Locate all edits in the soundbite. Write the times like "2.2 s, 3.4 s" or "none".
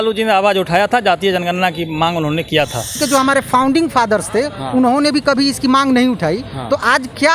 3.0 s